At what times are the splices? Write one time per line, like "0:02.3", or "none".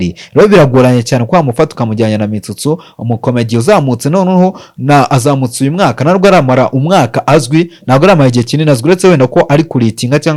none

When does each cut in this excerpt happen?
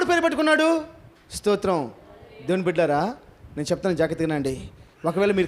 none

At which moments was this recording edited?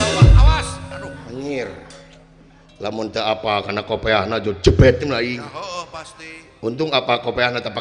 none

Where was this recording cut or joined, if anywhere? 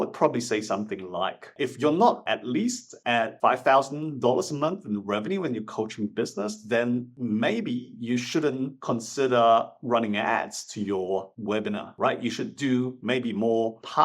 0:01.5
0:03.3

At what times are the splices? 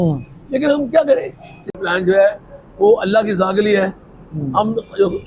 0:01.8

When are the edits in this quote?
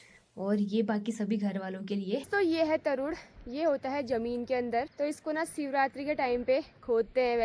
0:02.3
0:04.9

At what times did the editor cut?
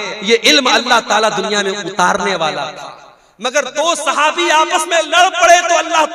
none

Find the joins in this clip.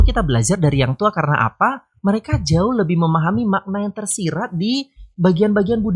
none

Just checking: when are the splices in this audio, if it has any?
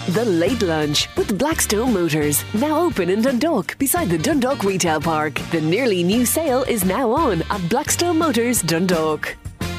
none

